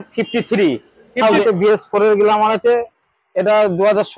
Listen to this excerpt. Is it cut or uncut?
cut